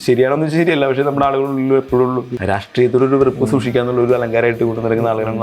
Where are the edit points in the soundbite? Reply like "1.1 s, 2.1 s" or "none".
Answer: 2.3 s